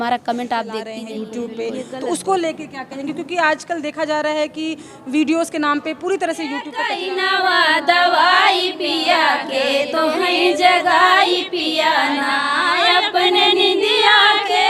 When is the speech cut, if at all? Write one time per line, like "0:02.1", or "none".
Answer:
0:01.0
0:06.8